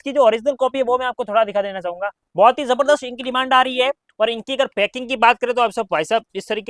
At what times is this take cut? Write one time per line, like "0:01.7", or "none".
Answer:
0:02.2